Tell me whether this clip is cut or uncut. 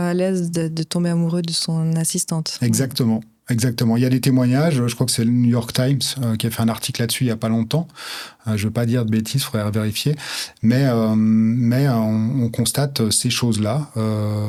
uncut